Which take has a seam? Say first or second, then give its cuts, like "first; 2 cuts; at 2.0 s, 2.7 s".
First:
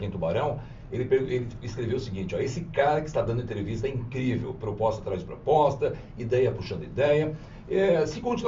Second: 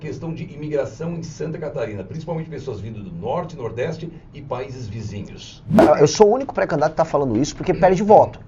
second; 1 cut; at 5.8 s